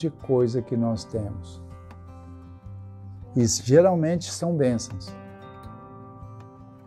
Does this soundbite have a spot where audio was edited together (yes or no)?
yes